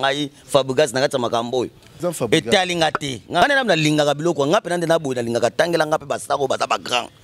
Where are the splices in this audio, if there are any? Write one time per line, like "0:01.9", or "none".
0:01.9
0:03.4